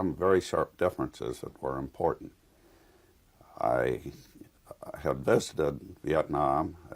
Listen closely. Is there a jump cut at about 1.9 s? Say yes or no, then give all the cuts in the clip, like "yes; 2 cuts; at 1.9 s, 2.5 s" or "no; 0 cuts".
no; 1 cut; at 5.8 s